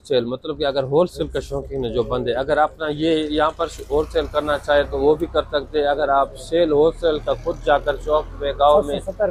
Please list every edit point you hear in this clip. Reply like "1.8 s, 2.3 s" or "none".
none